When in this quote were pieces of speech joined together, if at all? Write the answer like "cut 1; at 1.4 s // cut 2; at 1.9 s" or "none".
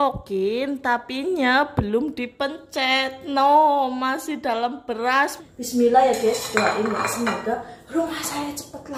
cut 1; at 5.4 s